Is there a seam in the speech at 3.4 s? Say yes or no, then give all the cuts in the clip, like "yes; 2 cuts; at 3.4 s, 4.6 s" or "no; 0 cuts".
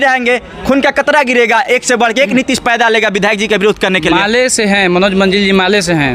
no; 0 cuts